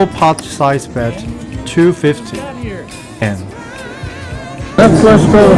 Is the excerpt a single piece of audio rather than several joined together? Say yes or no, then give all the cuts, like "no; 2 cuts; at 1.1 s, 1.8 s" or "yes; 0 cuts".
no; 1 cut; at 3.2 s